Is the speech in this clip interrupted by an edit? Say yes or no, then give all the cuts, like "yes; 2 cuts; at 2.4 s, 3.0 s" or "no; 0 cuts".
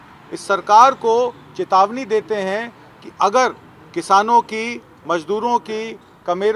no; 0 cuts